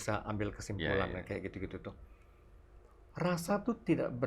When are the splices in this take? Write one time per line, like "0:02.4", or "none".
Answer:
none